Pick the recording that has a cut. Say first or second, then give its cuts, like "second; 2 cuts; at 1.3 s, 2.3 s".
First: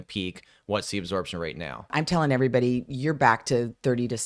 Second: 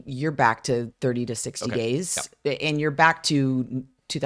first; 1 cut; at 1.9 s